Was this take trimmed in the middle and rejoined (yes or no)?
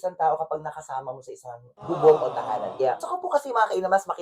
yes